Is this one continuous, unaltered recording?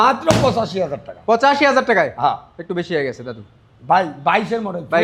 yes; 0 cuts

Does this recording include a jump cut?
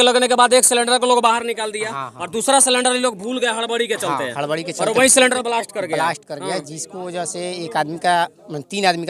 no; 0 cuts

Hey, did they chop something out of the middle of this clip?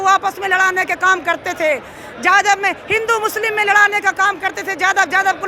no; 0 cuts

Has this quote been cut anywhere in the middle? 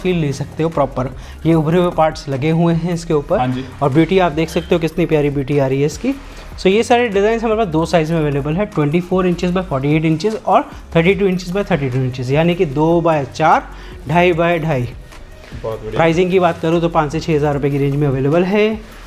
no; 0 cuts

